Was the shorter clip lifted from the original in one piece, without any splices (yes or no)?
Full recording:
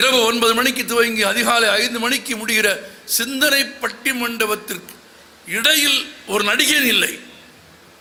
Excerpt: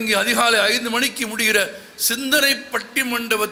yes